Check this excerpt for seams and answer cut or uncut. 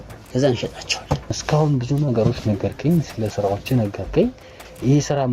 cut